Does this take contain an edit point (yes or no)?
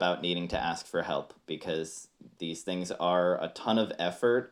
no